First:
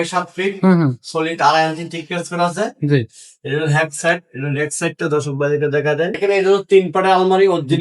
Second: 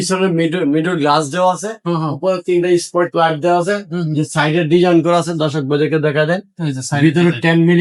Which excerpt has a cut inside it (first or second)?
first